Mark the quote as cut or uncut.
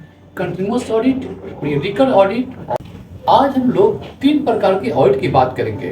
cut